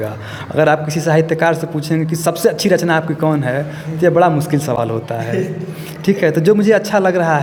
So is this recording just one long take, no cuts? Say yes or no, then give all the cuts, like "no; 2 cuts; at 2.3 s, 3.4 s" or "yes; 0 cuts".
yes; 0 cuts